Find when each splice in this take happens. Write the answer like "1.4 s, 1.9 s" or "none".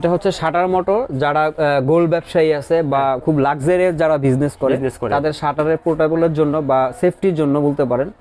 none